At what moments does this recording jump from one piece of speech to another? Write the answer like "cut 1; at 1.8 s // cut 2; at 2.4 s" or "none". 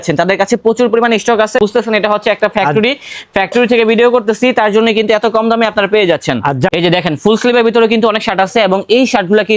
cut 1; at 1.6 s // cut 2; at 6.7 s